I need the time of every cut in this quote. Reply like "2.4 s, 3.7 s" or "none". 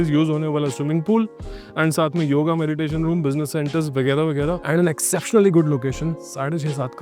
4.6 s